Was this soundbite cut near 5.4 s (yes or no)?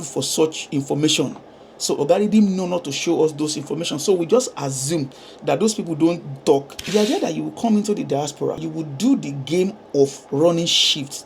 no